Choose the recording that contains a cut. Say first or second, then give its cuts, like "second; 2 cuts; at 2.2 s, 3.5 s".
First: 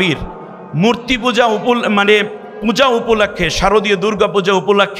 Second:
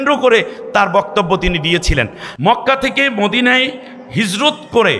second; 1 cut; at 2.2 s